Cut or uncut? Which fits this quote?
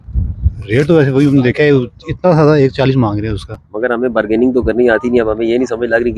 uncut